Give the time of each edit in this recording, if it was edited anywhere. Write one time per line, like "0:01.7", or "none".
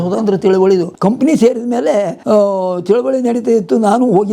0:00.9
0:02.2